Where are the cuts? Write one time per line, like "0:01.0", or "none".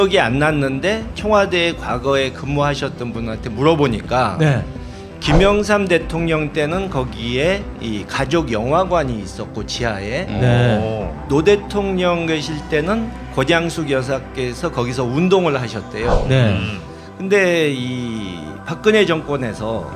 0:08.2